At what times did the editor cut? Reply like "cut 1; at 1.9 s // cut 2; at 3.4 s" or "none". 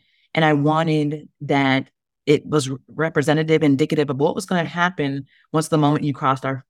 none